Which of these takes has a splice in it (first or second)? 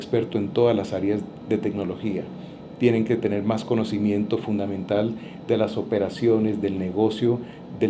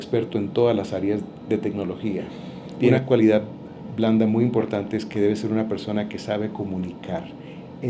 second